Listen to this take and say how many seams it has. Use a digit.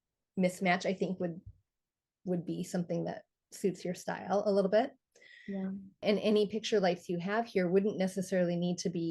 0